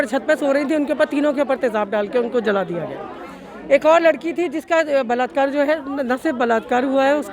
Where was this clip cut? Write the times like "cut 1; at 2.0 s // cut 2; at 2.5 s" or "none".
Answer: none